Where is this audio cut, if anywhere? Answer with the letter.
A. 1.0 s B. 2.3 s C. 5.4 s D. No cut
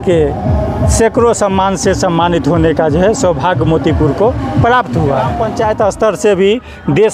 C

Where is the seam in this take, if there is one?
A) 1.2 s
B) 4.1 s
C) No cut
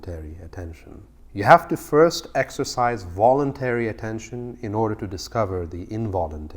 A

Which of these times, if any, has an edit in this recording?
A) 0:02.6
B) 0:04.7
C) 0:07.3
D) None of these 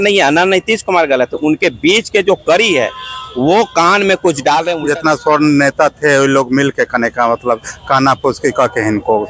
B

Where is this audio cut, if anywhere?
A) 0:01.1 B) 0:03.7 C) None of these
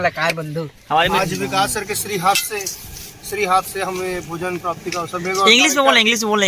A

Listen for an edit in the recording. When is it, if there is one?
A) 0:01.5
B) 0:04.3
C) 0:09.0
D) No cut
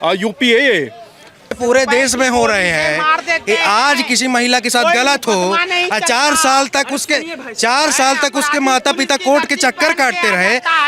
A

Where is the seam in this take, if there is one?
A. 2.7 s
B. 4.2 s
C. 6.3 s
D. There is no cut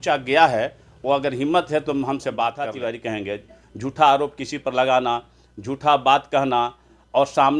A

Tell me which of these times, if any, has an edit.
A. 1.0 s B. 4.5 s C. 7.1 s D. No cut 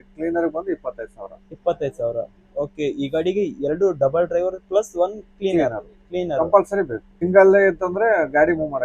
C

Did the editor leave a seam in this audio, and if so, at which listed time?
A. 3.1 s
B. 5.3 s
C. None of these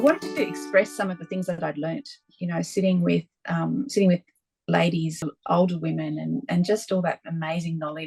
B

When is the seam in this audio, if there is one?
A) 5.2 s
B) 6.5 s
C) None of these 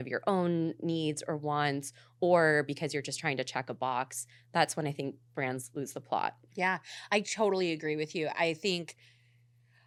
C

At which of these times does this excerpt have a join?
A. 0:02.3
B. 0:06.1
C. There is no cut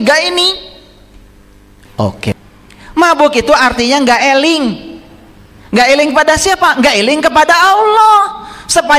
A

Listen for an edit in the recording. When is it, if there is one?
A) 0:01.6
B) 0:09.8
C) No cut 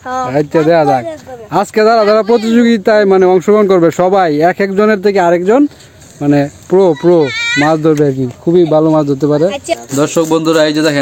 B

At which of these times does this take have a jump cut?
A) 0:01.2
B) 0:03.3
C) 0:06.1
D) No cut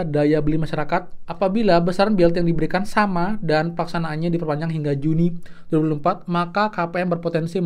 A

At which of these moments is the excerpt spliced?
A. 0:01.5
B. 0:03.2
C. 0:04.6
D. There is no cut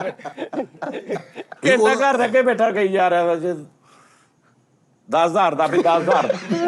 A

